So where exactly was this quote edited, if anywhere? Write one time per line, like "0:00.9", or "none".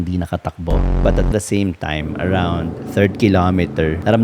0:00.9